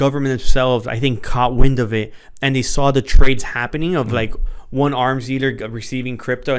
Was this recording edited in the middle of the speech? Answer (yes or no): no